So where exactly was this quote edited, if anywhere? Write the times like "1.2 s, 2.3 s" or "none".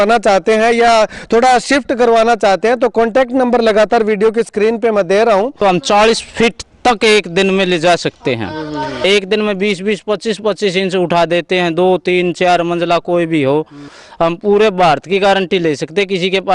5.6 s, 9.0 s, 14.0 s